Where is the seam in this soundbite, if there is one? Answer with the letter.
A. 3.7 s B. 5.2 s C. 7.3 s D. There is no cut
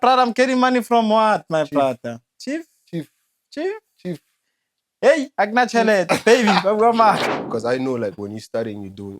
C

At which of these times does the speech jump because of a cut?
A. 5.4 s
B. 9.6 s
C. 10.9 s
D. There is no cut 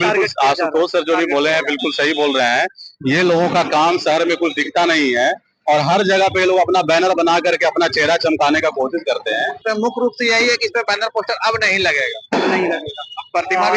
B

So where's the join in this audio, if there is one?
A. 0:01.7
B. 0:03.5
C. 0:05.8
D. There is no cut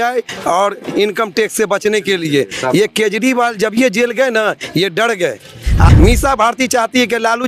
C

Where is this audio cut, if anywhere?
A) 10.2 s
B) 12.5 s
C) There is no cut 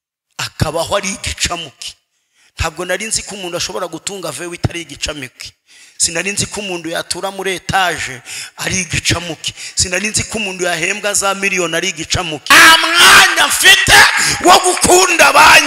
B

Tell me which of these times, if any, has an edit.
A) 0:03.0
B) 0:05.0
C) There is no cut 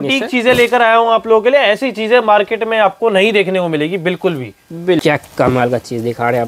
B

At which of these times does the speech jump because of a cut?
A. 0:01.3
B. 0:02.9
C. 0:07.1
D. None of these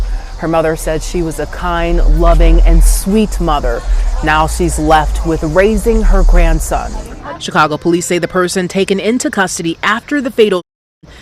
C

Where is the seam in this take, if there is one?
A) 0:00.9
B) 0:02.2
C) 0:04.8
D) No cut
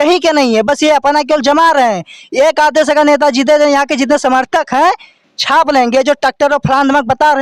D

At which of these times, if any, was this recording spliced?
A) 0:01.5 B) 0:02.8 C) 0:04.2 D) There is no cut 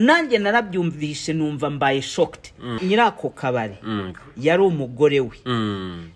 B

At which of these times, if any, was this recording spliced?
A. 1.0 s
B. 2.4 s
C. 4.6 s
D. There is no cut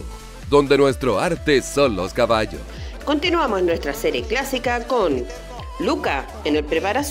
B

